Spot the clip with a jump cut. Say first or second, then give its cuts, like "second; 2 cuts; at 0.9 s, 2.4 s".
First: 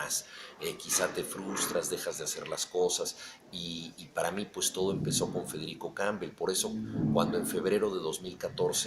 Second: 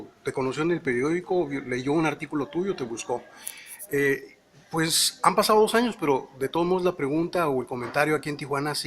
second; 1 cut; at 2.1 s